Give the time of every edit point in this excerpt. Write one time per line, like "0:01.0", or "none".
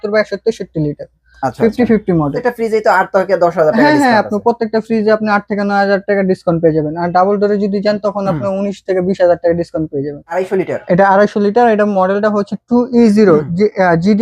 0:02.4
0:10.4